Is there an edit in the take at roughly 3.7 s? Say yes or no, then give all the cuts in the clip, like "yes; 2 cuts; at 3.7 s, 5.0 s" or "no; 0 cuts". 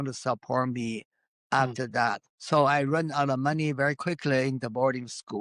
no; 1 cut; at 2.3 s